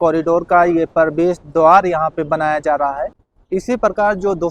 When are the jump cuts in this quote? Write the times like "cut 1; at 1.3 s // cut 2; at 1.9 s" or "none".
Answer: cut 1; at 3.3 s